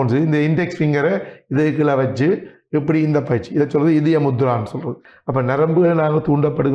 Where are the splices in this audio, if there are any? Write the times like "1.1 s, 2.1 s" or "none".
5.1 s